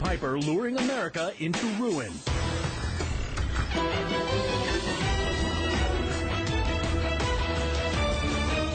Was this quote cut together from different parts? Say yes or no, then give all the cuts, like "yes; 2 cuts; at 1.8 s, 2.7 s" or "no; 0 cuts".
no; 0 cuts